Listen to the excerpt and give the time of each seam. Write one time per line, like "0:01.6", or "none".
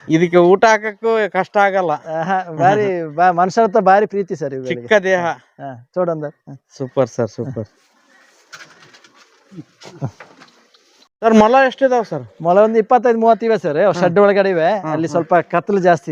none